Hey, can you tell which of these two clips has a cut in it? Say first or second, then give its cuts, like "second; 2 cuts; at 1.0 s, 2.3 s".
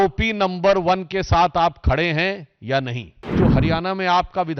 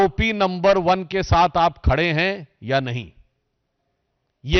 first; 1 cut; at 3.3 s